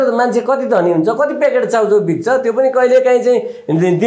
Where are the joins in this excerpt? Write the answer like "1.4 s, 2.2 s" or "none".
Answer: none